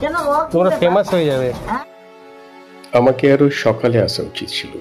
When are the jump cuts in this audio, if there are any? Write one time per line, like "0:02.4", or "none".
0:01.8